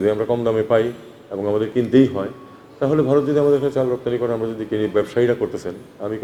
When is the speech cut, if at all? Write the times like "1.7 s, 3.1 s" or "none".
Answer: none